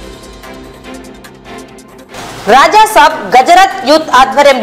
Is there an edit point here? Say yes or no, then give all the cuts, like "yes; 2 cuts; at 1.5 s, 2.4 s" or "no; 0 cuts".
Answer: yes; 1 cut; at 1.5 s